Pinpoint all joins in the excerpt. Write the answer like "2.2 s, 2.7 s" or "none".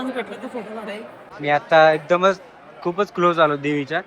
1.3 s